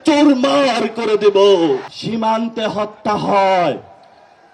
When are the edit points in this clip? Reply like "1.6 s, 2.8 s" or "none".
1.9 s